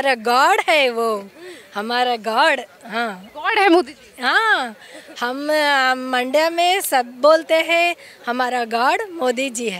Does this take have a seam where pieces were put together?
no; 0 cuts

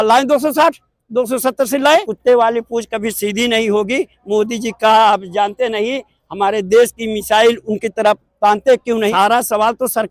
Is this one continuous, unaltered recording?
no; 2 cuts; at 1.8 s, 9.1 s

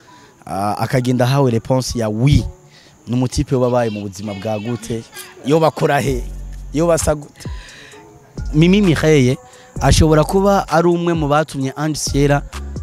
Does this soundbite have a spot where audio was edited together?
yes; 1 cut; at 8.5 s

